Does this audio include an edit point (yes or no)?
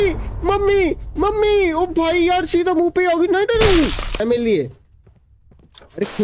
yes